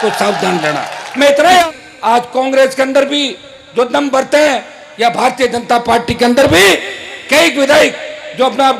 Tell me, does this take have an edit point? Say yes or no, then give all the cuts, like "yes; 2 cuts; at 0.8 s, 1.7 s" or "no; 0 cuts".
yes; 1 cut; at 1.6 s